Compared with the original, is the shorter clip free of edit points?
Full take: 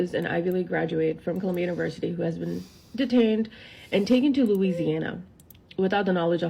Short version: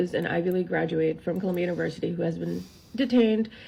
yes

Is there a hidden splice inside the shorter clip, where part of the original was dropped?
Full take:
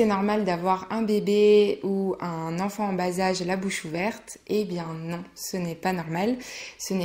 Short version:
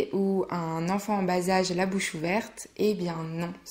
no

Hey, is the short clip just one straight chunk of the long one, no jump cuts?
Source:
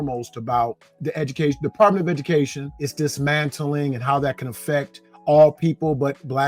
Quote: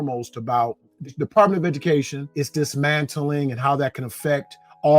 no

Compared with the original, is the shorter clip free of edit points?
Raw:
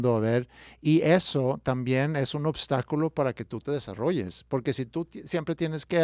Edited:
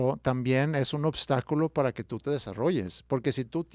yes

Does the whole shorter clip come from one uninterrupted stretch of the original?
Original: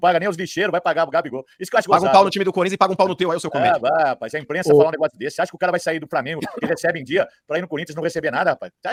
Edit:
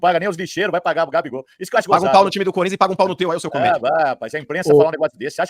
yes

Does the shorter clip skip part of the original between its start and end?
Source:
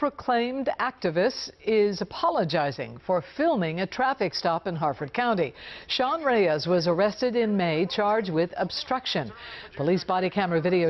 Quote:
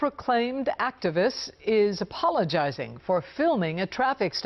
no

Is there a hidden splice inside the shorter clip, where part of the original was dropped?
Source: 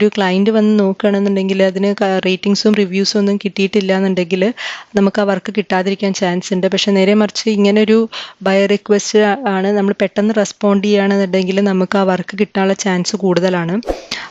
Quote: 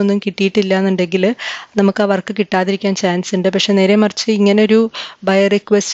no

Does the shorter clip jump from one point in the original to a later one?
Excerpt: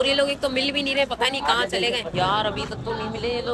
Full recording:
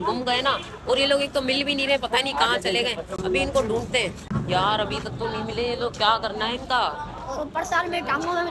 yes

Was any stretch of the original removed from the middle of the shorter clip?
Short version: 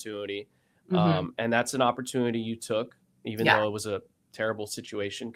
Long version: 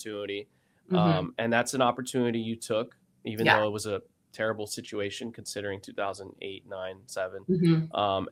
no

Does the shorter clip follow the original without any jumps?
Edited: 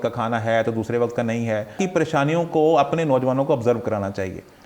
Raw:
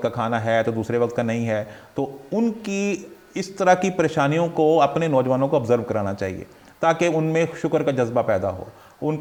no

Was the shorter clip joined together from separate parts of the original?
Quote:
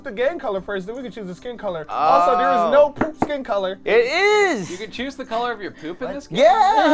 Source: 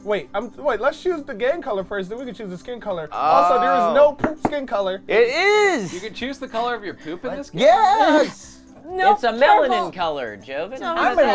no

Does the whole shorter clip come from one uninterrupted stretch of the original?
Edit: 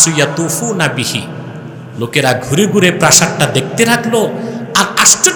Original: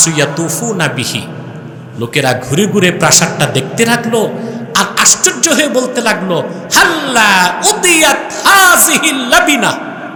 yes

